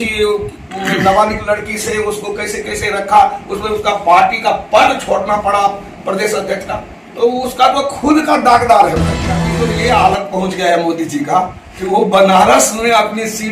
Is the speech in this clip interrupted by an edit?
yes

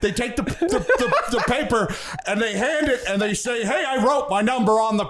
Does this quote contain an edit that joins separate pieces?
no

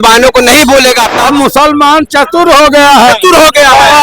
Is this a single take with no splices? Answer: no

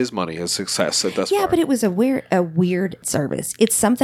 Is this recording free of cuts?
no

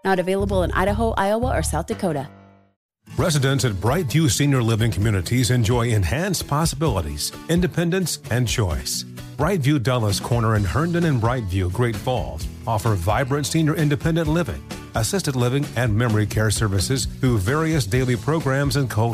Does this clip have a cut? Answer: yes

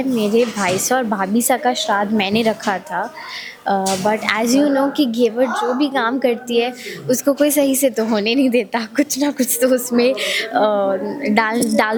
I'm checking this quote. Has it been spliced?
no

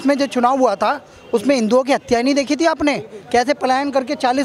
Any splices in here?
no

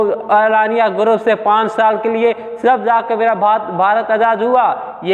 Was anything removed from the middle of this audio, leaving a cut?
no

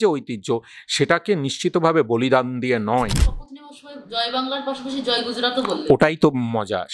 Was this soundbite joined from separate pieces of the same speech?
yes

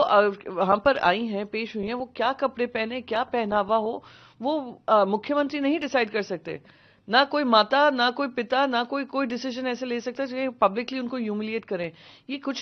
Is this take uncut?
yes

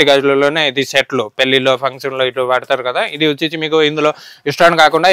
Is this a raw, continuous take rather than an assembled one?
yes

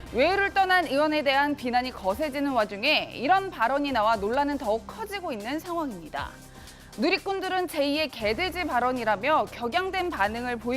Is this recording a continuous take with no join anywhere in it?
no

